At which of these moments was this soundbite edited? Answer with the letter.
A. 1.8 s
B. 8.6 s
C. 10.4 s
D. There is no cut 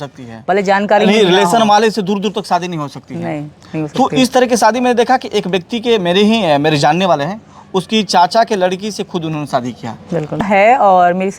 C